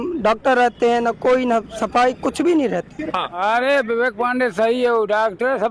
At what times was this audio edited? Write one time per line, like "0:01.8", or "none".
0:03.3